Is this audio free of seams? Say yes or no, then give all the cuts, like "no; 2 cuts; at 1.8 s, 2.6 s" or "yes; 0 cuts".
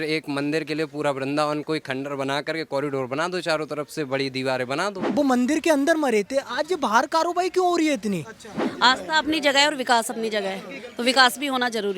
no; 2 cuts; at 5.0 s, 8.7 s